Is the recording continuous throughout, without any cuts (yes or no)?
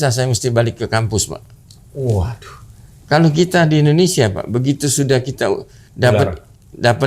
yes